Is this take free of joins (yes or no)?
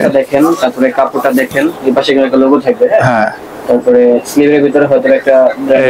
yes